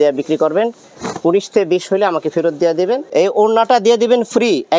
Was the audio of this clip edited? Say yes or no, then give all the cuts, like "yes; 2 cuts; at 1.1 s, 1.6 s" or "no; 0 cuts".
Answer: yes; 1 cut; at 3.1 s